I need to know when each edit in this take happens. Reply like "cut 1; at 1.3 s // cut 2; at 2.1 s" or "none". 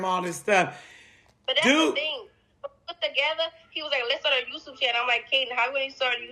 none

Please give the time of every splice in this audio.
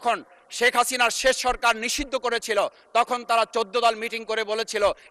none

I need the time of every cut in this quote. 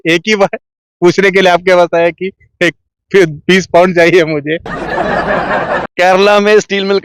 none

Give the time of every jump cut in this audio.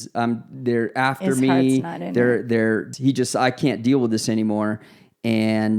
cut 1; at 2.9 s

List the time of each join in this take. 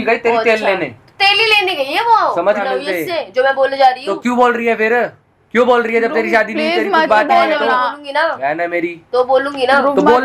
cut 1; at 2.4 s

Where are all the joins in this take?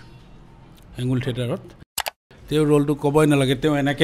cut 1; at 1.9 s

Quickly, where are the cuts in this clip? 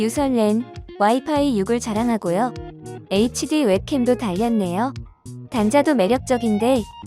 cut 1; at 3.0 s

